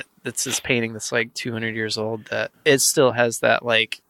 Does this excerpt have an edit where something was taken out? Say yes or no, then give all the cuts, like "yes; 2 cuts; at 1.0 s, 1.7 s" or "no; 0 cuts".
yes; 1 cut; at 2.5 s